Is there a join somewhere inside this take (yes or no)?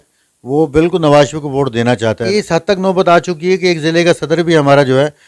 yes